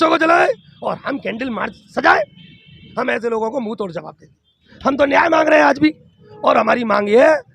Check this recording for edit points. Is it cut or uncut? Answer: cut